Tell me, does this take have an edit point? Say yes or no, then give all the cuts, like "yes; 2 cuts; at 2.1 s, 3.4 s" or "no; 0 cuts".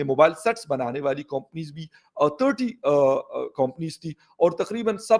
no; 0 cuts